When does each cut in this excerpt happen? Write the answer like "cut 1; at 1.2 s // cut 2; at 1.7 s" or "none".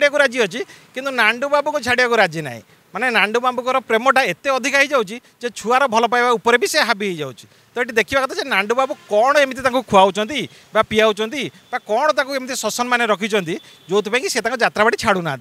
none